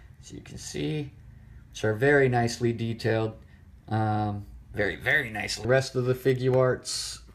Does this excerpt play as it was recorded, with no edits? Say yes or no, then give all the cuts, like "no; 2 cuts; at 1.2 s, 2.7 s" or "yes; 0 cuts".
yes; 0 cuts